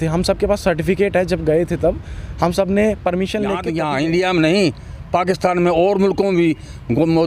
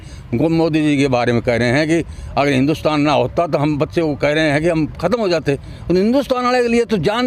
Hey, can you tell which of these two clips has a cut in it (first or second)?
first